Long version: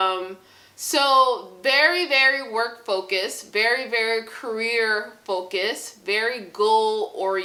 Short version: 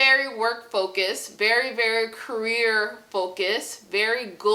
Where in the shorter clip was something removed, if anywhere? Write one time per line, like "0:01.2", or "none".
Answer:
none

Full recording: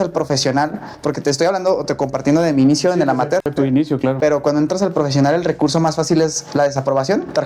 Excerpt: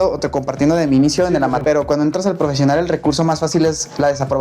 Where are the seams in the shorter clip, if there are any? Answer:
0:01.6

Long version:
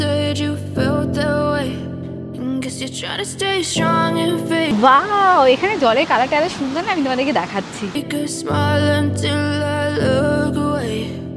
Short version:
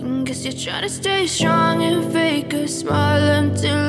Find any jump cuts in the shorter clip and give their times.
0:02.3

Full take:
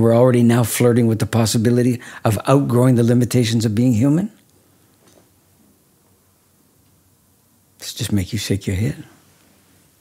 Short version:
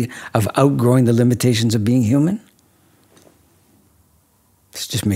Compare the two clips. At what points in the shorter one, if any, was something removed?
0:03.9

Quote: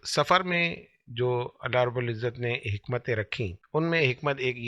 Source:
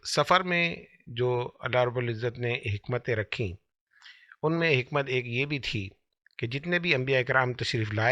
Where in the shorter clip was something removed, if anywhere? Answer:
0:03.6

